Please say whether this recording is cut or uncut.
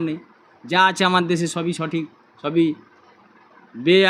uncut